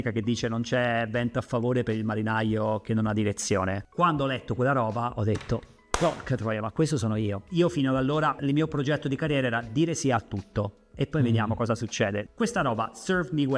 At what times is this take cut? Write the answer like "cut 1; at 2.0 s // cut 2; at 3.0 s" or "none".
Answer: cut 1; at 7.4 s // cut 2; at 8.4 s // cut 3; at 12.2 s

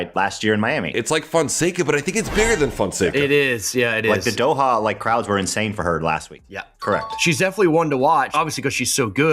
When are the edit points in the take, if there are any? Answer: cut 1; at 6.4 s

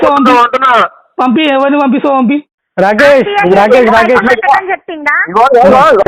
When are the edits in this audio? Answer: cut 1; at 2.5 s

